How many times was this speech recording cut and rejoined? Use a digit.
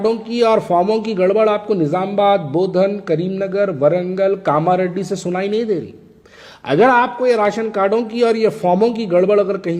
0